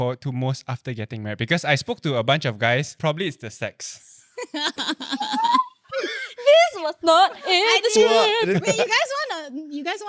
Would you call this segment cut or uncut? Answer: cut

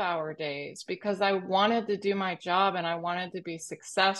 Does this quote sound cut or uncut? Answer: uncut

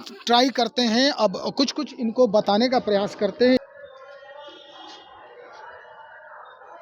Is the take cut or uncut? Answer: cut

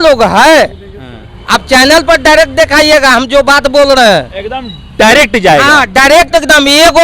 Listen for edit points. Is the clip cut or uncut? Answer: uncut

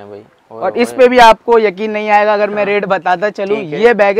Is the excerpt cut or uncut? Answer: uncut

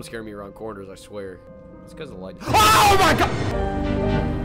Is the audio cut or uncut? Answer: cut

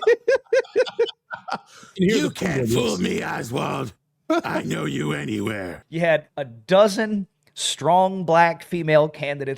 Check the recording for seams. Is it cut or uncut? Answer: cut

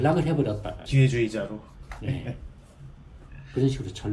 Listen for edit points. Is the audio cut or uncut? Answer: uncut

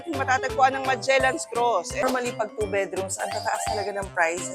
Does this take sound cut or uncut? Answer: cut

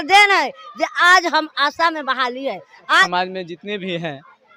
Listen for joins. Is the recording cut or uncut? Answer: cut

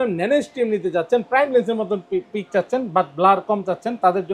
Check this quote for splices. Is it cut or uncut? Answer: uncut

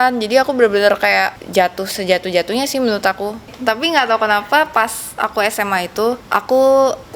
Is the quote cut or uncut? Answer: cut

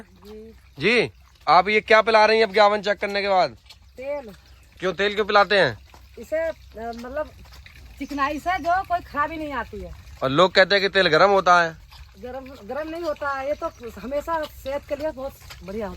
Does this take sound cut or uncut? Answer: cut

